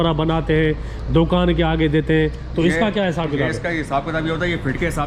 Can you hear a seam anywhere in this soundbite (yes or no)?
no